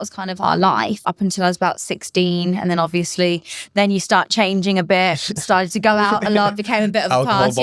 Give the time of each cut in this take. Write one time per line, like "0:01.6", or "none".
0:01.0

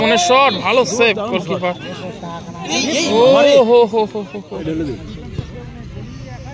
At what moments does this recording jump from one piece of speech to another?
0:04.6

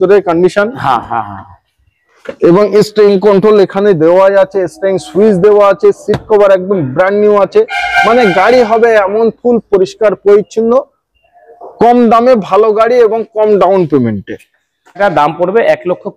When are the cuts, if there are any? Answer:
0:15.0

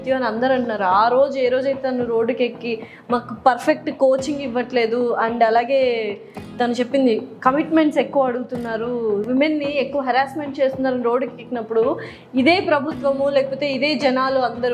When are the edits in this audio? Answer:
none

